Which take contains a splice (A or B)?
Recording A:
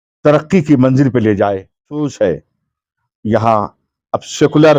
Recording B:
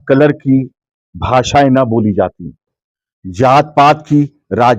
A